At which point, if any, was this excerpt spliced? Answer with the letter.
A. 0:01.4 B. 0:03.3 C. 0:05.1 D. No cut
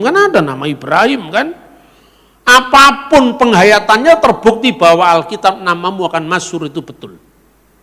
D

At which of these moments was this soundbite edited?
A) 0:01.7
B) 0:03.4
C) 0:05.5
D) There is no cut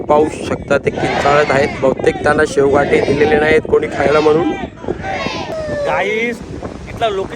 C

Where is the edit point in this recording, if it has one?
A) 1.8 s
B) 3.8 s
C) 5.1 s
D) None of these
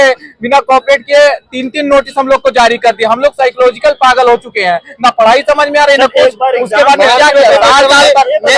D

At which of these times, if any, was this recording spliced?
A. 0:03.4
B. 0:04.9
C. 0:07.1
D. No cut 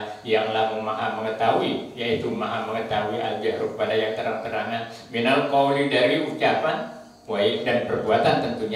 D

